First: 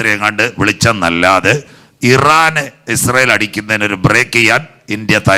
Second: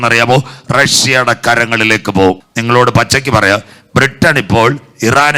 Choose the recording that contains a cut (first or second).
second